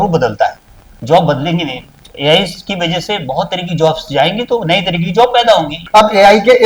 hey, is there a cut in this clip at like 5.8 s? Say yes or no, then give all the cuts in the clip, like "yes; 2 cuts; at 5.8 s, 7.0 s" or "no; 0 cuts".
yes; 1 cut; at 5.8 s